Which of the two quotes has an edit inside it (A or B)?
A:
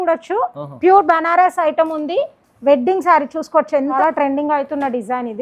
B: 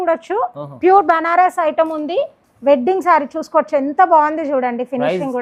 A